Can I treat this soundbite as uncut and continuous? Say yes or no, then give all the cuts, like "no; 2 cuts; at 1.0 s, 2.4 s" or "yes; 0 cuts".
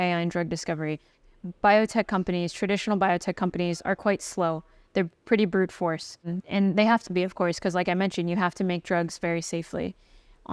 no; 2 cuts; at 1.1 s, 6.3 s